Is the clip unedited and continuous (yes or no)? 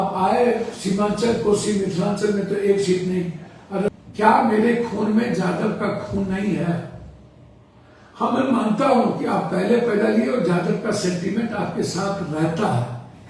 no